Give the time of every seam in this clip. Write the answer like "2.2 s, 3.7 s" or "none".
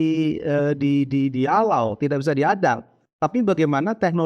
none